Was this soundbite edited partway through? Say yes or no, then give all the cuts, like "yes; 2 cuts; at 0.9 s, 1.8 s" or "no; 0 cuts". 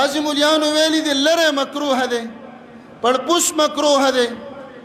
no; 0 cuts